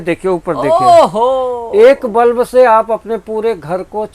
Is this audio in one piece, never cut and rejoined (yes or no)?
yes